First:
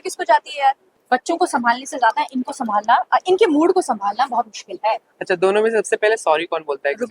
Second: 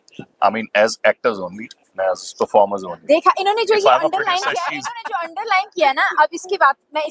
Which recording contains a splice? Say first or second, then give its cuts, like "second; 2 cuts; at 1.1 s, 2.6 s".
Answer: first; 2 cuts; at 0.9 s, 5.1 s